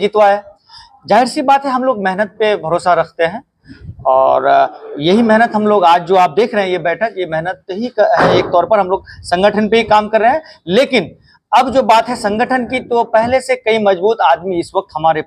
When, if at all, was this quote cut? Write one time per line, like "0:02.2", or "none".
none